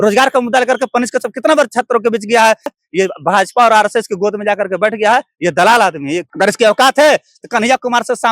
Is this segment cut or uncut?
cut